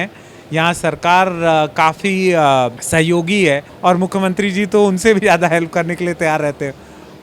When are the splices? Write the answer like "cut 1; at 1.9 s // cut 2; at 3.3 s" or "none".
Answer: cut 1; at 2.8 s // cut 2; at 3.7 s